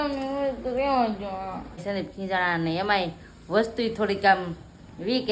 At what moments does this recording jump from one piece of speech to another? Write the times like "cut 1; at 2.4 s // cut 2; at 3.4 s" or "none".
cut 1; at 1.7 s